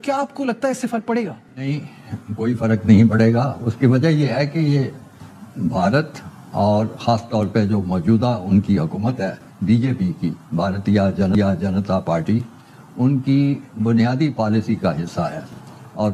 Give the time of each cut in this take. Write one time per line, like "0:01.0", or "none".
none